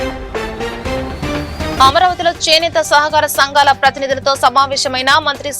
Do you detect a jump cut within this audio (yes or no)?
no